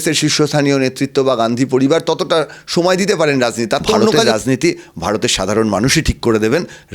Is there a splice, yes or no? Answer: yes